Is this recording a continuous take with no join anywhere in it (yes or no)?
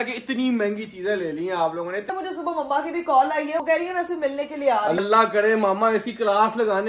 no